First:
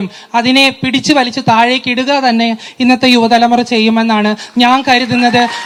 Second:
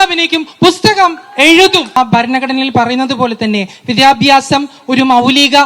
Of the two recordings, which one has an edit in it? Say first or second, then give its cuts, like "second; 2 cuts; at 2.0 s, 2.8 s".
second; 1 cut; at 2.0 s